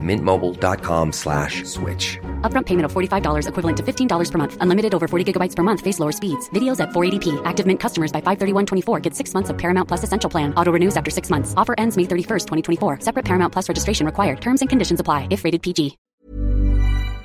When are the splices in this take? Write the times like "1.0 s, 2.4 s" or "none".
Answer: 16.0 s